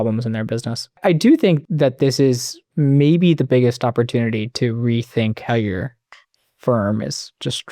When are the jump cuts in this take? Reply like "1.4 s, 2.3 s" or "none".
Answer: 1.0 s, 1.6 s